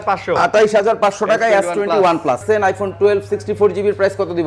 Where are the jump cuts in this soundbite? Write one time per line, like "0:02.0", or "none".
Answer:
0:02.4